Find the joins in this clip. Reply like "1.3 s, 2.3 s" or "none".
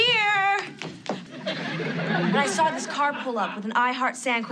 1.2 s